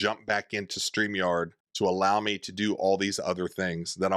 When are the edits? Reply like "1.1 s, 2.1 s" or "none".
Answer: 1.6 s